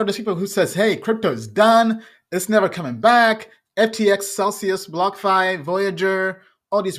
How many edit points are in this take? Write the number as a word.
zero